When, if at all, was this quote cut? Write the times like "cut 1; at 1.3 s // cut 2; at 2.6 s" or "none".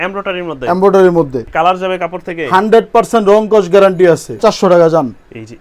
cut 1; at 1.5 s // cut 2; at 4.4 s